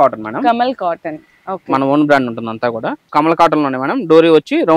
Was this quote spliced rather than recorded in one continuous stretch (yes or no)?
yes